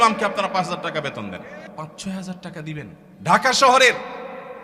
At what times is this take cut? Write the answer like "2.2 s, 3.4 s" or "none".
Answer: 1.6 s, 3.0 s